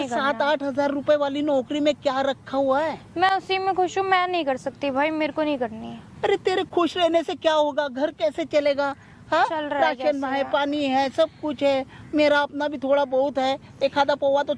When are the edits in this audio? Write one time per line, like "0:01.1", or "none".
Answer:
none